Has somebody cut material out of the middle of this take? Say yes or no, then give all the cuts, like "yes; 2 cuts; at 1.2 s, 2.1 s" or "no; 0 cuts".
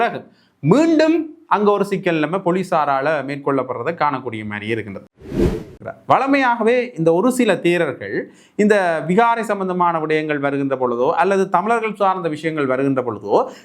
yes; 1 cut; at 5.4 s